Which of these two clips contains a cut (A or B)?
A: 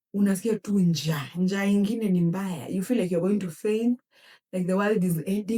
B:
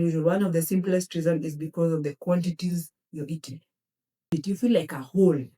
B